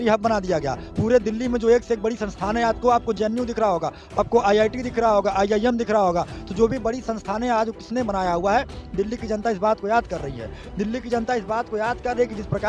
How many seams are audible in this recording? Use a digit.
0